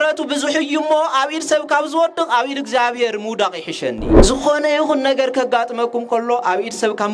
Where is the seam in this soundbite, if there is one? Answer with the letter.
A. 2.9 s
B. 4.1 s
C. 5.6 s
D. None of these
B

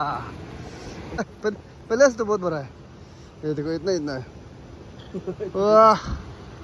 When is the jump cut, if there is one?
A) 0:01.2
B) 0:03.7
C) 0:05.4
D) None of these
A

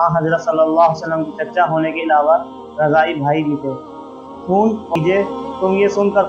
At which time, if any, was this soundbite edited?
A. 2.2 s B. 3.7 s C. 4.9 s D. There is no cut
C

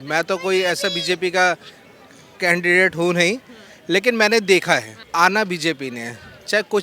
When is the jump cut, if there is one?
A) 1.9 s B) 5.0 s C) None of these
B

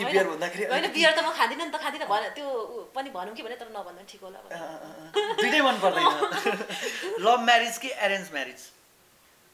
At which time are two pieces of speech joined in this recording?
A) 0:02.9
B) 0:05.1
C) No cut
B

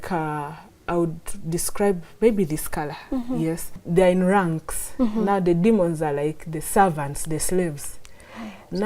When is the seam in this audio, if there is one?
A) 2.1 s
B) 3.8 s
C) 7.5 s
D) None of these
B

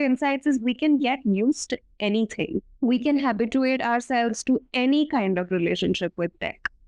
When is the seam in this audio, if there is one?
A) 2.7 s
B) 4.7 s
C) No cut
A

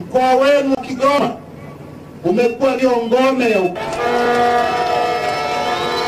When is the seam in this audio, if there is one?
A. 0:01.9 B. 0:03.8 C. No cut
B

